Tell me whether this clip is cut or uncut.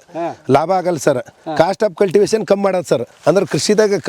cut